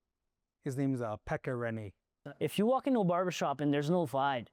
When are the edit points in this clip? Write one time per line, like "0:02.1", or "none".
0:02.1

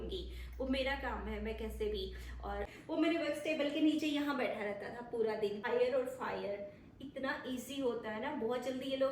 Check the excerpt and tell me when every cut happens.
0:02.7
0:05.6

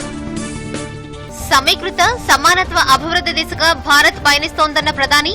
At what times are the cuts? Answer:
0:00.9

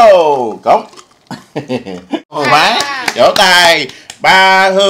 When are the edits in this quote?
0:02.4

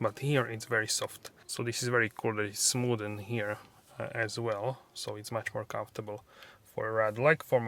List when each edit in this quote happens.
none

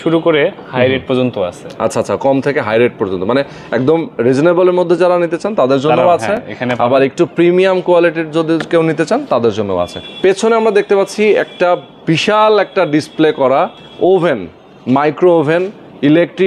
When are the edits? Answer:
none

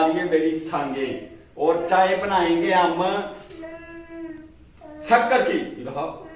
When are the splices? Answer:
none

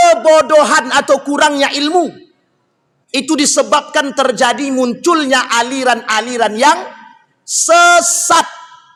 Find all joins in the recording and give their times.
none

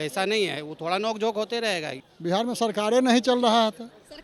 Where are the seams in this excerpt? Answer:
0:02.0

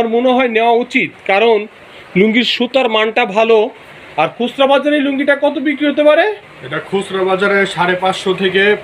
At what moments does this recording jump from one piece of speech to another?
none

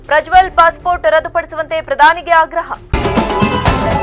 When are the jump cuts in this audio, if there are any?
0:02.8

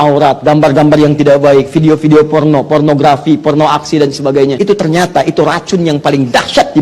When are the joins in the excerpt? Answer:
0:04.6

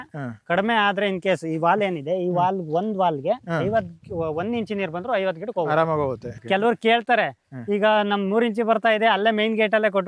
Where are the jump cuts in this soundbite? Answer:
0:06.4

